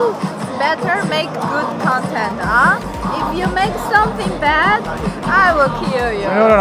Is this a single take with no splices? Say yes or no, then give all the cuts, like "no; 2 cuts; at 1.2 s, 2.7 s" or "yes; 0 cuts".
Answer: yes; 0 cuts